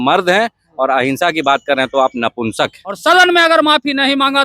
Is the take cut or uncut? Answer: cut